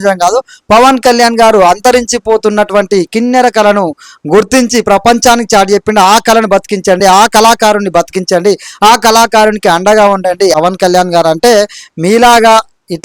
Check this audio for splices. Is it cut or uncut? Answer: cut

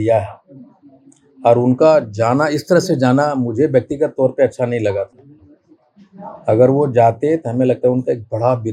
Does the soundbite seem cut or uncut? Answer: uncut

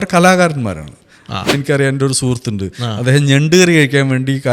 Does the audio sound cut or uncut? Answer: cut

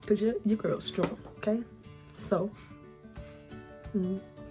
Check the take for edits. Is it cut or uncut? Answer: uncut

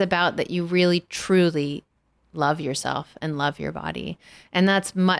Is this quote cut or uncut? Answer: uncut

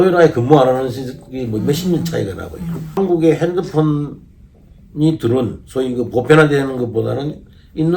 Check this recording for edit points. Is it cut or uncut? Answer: cut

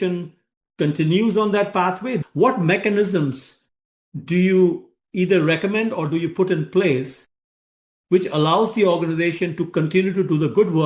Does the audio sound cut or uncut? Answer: cut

